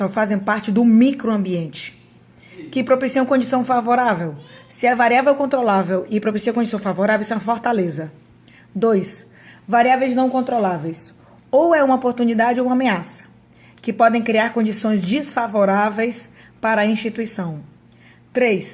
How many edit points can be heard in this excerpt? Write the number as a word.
one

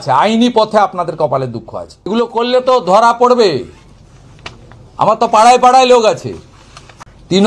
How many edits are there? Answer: one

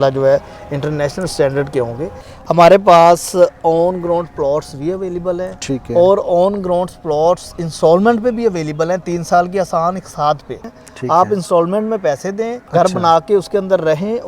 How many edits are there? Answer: three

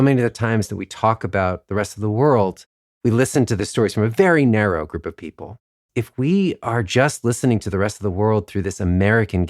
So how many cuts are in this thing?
two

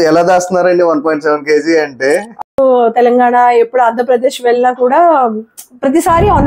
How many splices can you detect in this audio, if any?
one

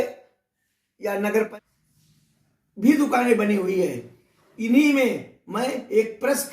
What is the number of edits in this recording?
one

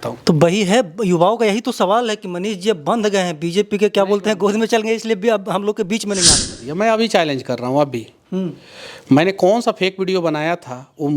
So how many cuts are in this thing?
one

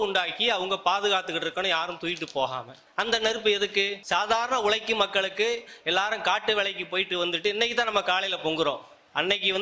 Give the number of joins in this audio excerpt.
two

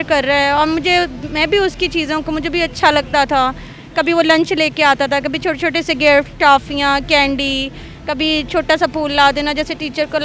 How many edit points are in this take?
zero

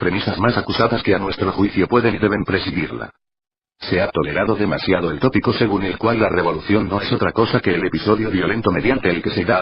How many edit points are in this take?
one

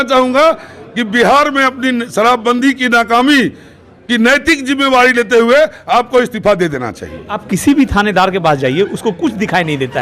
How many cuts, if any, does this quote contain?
one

